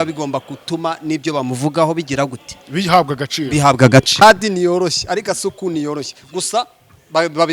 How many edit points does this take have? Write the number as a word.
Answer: one